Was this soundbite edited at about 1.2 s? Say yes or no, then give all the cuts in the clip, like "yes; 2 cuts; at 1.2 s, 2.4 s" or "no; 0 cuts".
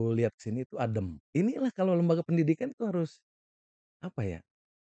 yes; 1 cut; at 1.2 s